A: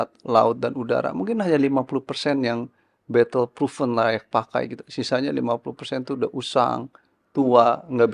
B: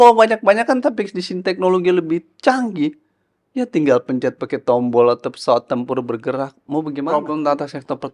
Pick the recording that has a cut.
B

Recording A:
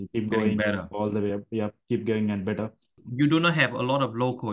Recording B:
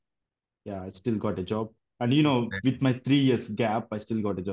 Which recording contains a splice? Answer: A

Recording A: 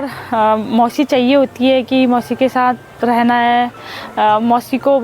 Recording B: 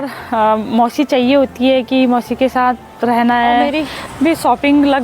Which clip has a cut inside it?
B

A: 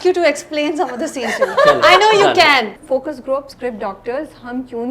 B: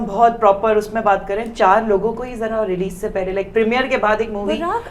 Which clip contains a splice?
A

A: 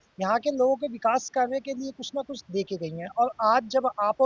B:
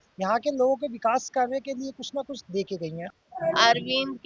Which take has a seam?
B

